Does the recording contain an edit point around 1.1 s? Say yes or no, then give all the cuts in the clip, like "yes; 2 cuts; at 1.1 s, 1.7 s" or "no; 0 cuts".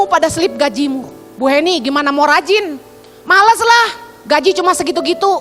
no; 0 cuts